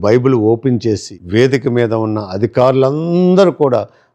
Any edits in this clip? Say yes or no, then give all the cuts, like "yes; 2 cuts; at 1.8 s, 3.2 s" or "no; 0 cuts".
yes; 1 cut; at 1.1 s